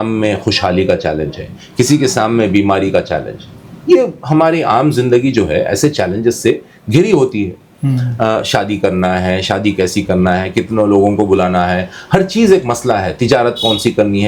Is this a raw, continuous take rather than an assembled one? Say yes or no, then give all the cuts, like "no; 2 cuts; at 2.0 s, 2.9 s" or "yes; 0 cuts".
yes; 0 cuts